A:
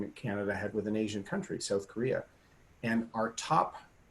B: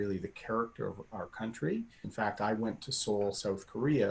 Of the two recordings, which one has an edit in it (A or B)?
B